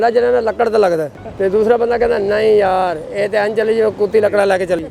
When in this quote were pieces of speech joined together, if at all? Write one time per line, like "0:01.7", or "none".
0:01.2